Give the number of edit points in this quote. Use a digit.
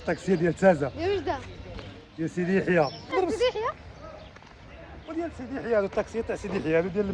1